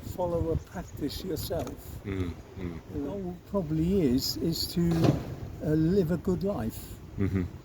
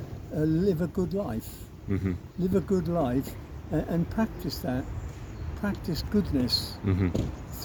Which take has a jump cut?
first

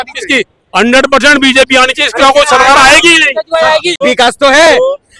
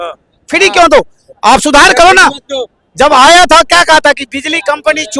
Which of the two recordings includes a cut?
first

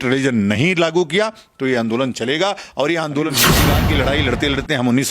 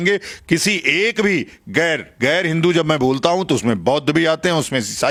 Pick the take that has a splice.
first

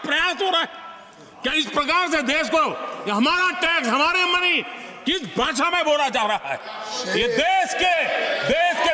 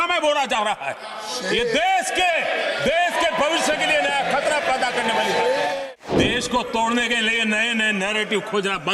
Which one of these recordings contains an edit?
second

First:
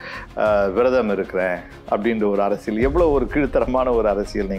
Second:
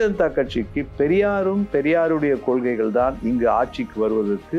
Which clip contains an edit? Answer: second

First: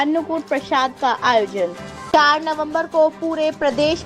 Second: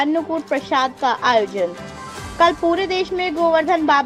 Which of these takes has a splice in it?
first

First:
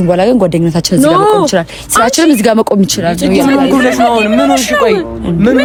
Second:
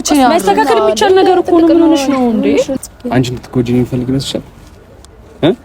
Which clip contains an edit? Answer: second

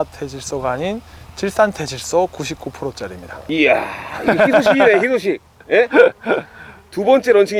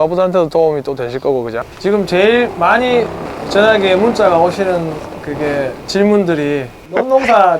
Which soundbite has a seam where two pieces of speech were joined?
second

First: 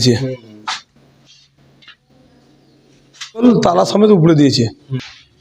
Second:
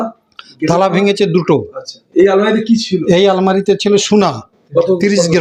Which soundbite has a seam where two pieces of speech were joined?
first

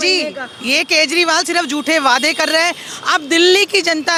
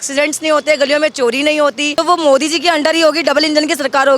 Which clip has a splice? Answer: second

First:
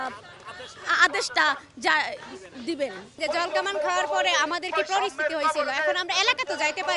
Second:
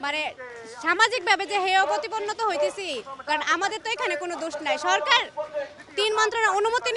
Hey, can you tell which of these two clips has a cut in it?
first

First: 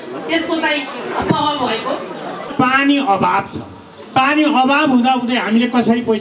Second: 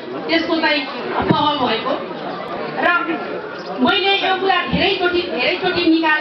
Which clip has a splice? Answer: first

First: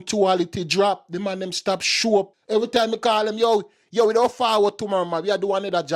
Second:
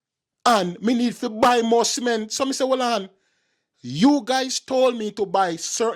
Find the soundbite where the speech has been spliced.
first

